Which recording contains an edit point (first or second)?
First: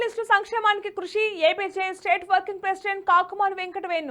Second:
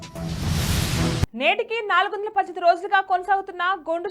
second